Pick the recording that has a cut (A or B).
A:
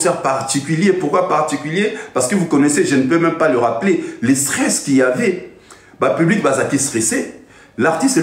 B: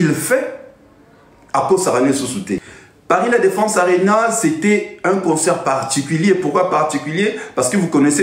B